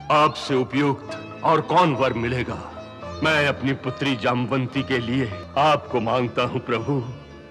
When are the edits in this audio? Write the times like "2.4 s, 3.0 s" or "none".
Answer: 3.0 s, 5.4 s